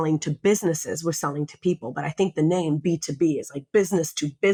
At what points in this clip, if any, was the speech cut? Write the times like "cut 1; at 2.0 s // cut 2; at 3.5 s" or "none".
none

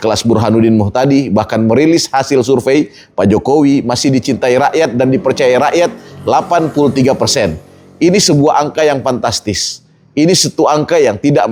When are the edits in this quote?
none

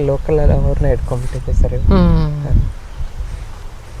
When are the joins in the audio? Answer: none

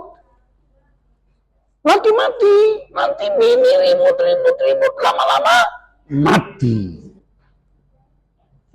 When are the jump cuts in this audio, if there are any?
cut 1; at 7.2 s

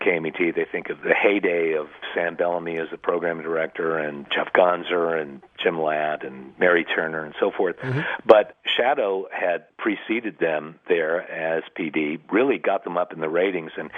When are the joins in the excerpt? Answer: cut 1; at 0.9 s // cut 2; at 4.2 s // cut 3; at 8.5 s // cut 4; at 9.6 s

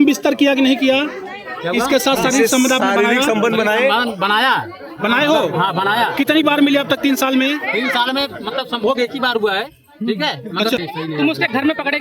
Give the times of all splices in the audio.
cut 1; at 10.9 s

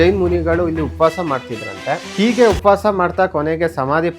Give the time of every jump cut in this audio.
cut 1; at 2.1 s

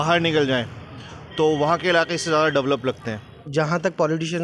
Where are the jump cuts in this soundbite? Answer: cut 1; at 3.3 s

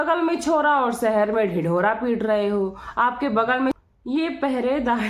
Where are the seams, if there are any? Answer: cut 1; at 3.8 s

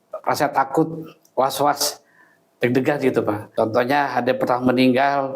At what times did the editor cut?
cut 1; at 3.4 s

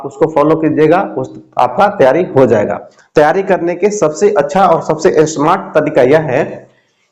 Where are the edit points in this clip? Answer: cut 1; at 2.9 s

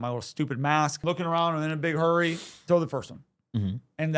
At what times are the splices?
cut 1; at 1.0 s

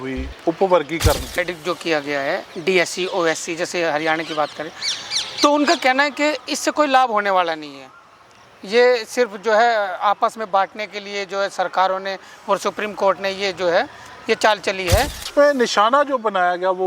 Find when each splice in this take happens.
cut 1; at 1.4 s // cut 2; at 15.3 s

